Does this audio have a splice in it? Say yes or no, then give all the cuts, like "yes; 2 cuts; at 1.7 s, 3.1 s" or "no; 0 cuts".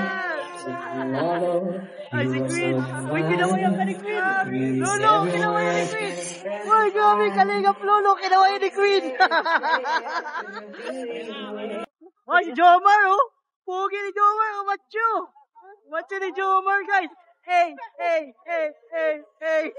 yes; 1 cut; at 11.8 s